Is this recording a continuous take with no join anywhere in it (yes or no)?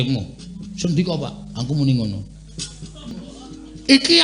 no